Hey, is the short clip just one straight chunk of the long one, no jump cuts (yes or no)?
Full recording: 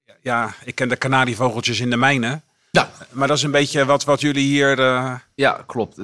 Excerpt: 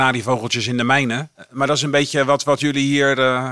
no